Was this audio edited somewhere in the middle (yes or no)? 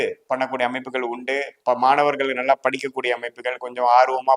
no